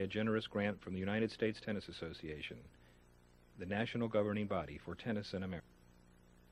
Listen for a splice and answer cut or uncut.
cut